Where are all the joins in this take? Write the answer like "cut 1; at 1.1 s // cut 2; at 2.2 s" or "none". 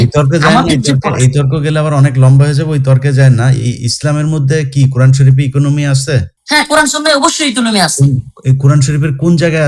cut 1; at 6.0 s